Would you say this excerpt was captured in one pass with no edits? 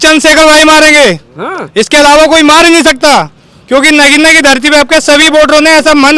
yes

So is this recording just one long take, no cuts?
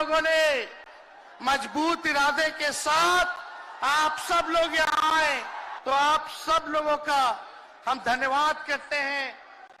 yes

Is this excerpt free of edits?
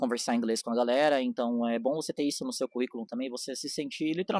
yes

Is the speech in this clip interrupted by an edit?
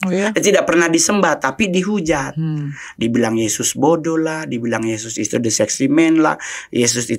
no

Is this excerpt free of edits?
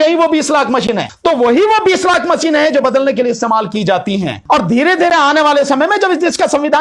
no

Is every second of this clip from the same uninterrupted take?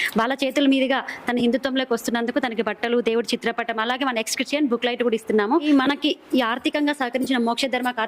no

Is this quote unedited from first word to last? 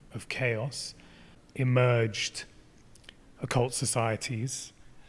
no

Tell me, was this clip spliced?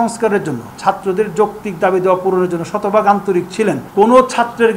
yes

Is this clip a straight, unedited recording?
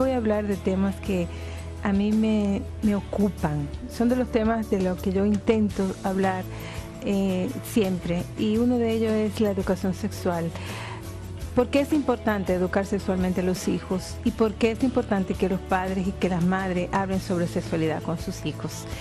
yes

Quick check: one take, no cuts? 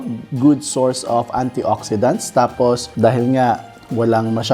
yes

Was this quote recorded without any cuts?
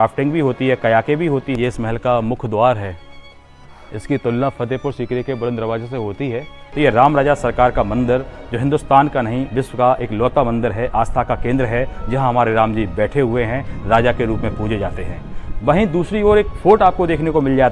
no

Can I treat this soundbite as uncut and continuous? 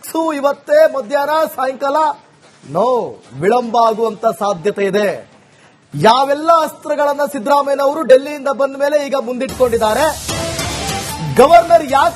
no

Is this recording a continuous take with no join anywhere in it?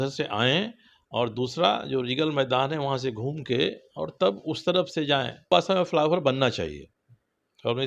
no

